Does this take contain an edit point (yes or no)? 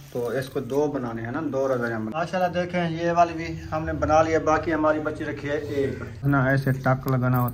yes